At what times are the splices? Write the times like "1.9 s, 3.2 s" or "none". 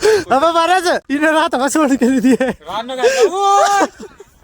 1.1 s